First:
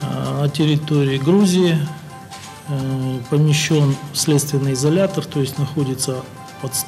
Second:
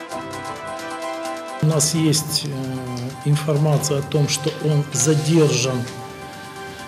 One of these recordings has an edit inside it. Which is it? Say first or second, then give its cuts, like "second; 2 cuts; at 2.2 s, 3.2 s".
second; 1 cut; at 1.5 s